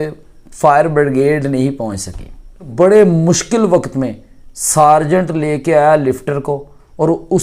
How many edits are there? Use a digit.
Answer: 1